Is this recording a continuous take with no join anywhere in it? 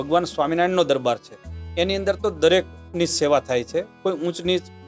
yes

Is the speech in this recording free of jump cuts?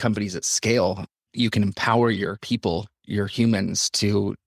no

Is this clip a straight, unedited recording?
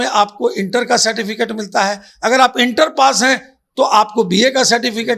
yes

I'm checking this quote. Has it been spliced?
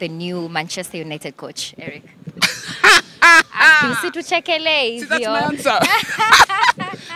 no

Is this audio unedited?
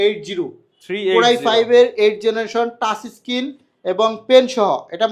yes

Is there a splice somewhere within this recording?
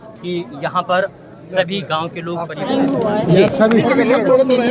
yes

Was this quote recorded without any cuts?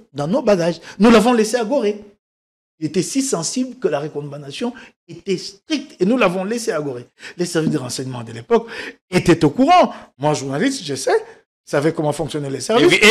yes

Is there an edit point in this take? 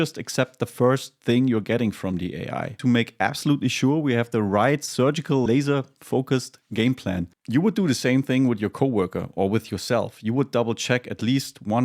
yes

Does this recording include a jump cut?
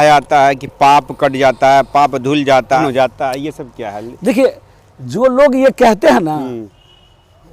yes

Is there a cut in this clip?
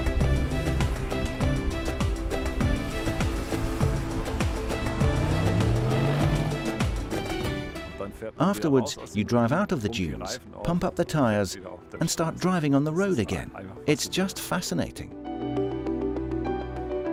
no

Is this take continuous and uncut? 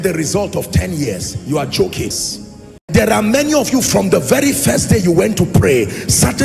no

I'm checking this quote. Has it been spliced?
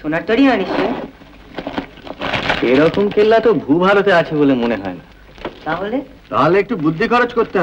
yes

